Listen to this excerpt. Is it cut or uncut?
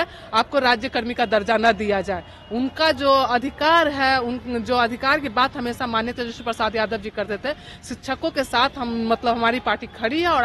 uncut